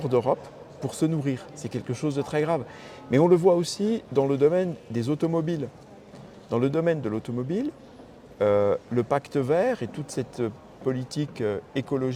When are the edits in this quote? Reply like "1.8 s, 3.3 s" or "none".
none